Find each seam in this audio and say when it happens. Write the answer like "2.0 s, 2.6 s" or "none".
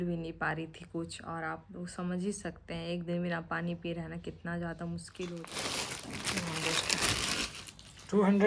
5.5 s